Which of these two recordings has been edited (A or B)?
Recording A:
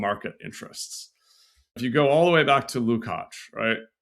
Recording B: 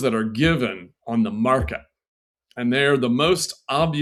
A